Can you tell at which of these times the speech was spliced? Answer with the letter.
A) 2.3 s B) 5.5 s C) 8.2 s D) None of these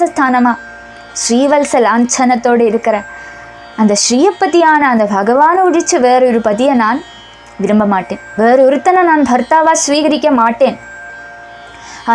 D